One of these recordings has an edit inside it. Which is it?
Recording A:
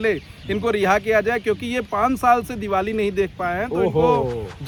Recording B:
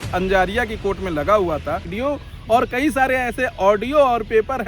B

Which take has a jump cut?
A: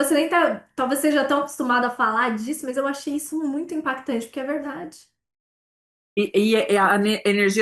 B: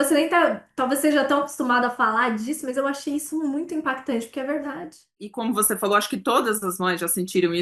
B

